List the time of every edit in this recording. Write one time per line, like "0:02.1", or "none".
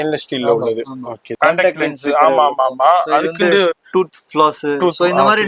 0:01.4